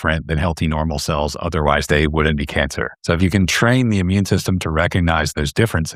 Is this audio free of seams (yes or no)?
no